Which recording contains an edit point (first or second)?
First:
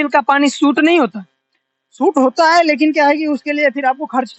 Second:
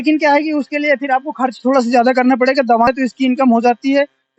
second